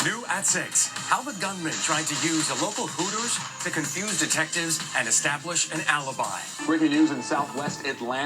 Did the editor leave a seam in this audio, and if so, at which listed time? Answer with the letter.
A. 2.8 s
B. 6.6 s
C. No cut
B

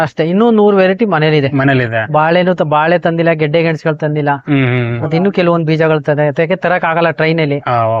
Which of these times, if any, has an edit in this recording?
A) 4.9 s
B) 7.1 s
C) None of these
C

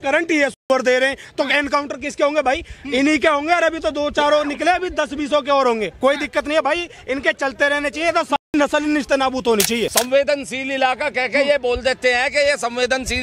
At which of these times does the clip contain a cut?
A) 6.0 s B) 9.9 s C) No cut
B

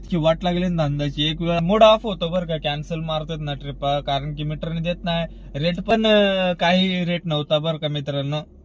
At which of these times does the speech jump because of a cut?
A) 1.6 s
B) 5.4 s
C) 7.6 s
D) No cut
A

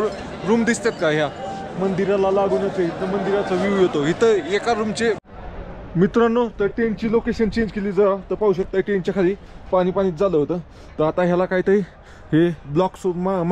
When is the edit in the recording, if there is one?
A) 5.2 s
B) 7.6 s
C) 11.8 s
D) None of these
A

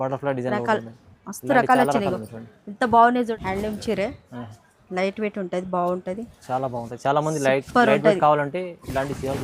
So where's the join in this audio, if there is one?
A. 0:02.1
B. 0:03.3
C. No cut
B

